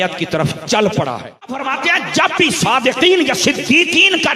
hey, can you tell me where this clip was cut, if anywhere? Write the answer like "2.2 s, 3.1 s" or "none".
1.7 s